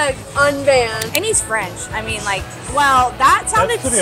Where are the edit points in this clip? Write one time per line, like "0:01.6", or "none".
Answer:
0:01.0